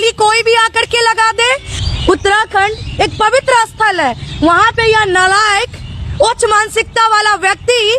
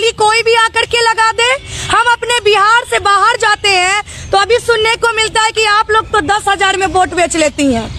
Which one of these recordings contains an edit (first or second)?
first